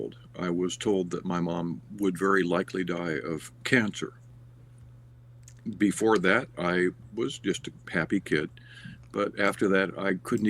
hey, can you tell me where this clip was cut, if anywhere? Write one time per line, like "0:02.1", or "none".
0:04.3